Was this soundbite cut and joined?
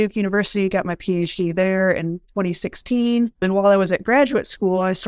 no; 0 cuts

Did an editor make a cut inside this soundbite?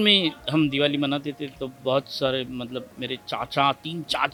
no; 0 cuts

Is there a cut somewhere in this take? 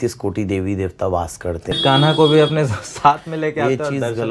yes; 1 cut; at 1.8 s

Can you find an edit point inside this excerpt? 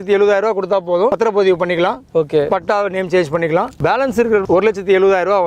yes; 2 cuts; at 1.1 s, 4.2 s

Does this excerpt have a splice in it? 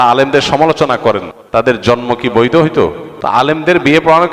yes; 2 cuts; at 1.3 s, 3.1 s

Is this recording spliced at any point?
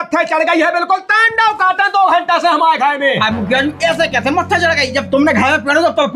no; 0 cuts

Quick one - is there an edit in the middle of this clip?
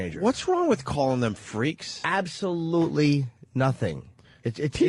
no; 0 cuts

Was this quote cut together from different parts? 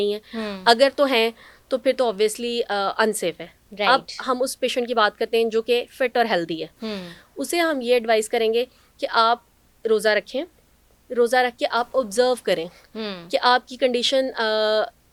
no; 0 cuts

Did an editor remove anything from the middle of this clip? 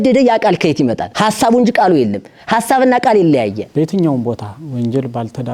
yes; 2 cuts; at 1.1 s, 3.6 s

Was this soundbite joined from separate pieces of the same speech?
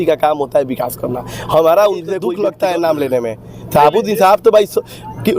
yes; 1 cut; at 2.3 s

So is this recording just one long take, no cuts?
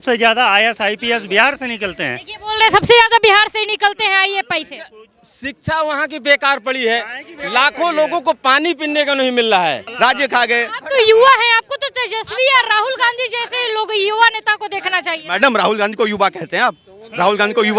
no; 1 cut; at 9.9 s

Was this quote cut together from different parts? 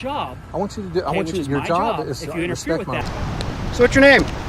yes; 1 cut; at 3.0 s

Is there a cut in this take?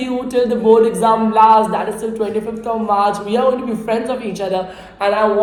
no; 0 cuts

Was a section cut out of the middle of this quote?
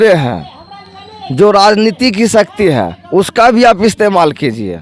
no; 0 cuts

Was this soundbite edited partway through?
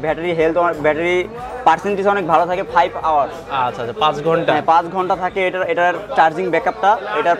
no; 0 cuts

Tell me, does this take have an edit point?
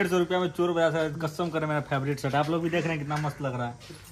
no; 0 cuts

